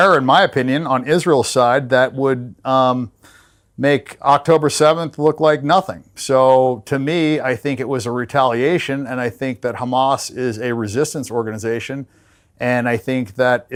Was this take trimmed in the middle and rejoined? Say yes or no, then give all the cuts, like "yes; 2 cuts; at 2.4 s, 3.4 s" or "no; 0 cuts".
no; 0 cuts